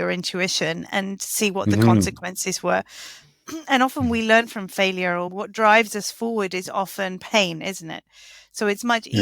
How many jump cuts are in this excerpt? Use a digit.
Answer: 1